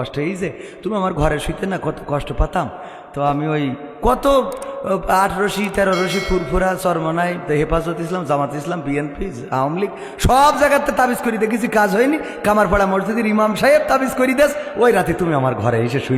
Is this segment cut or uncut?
uncut